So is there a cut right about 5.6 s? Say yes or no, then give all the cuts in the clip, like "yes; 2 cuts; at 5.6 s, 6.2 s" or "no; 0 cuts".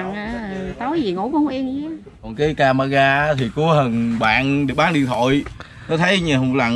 no; 1 cut; at 2.3 s